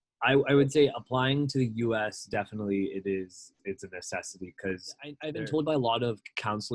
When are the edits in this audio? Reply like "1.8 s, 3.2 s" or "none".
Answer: 5.2 s